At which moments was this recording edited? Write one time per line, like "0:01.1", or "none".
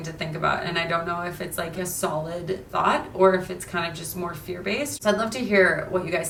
none